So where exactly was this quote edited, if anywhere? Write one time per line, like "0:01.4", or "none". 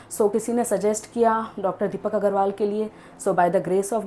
none